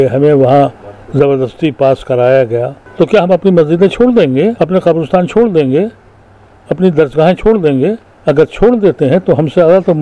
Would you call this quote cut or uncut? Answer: cut